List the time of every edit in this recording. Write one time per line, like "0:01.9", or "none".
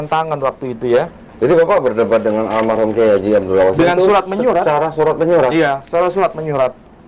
none